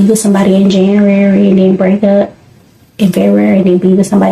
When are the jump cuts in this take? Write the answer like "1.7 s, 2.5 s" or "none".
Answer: none